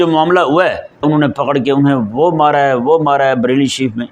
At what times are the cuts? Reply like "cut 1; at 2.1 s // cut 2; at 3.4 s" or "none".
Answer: cut 1; at 1.0 s